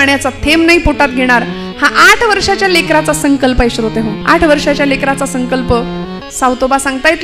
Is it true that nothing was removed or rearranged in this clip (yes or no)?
no